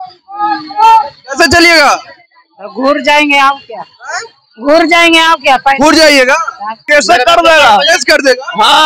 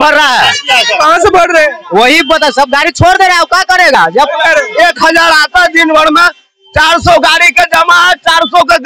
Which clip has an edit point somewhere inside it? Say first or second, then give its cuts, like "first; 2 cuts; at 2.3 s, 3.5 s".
first; 1 cut; at 6.8 s